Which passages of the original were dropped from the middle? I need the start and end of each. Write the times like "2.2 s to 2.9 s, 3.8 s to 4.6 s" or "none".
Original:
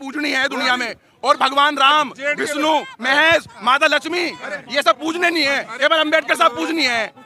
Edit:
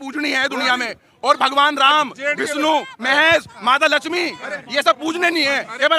none